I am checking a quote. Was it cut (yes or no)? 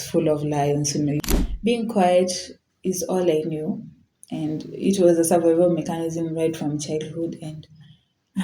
yes